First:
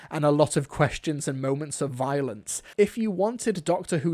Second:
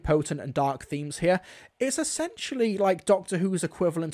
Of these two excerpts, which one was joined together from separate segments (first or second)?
first